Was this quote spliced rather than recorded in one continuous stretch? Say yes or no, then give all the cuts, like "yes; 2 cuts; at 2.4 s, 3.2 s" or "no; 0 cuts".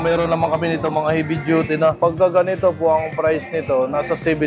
yes; 1 cut; at 2.0 s